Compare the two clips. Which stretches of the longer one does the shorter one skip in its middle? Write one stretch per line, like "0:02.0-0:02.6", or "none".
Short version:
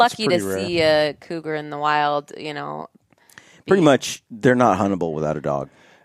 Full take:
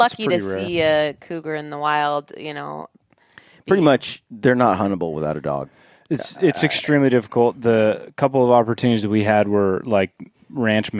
none